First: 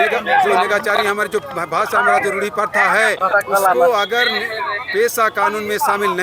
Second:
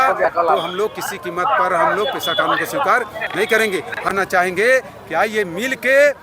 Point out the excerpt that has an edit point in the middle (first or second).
second